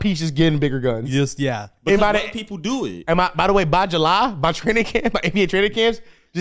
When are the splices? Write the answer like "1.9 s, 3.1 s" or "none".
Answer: none